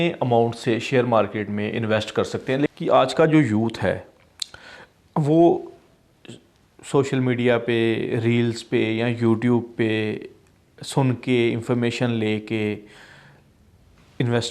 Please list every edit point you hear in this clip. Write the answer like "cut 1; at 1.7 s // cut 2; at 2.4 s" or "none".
cut 1; at 2.7 s